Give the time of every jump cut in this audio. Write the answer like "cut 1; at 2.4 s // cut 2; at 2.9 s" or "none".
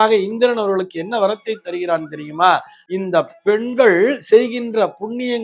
cut 1; at 2.8 s